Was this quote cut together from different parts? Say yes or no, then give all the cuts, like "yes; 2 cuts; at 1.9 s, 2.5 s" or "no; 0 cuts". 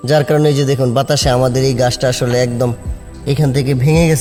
no; 0 cuts